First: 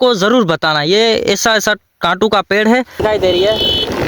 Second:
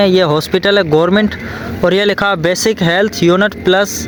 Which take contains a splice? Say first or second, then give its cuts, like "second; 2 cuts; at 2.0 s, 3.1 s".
first; 1 cut; at 3.0 s